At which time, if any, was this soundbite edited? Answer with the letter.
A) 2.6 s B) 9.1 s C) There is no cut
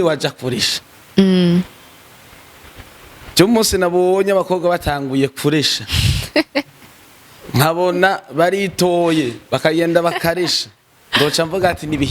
C